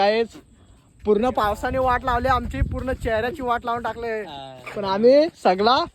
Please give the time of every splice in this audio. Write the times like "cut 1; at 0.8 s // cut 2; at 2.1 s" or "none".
none